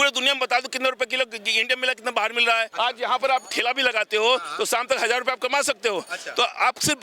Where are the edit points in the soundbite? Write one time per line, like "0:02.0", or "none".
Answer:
0:02.7